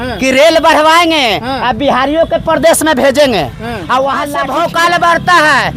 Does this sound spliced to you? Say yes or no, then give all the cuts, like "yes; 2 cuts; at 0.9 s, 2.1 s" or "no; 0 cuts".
yes; 1 cut; at 4.4 s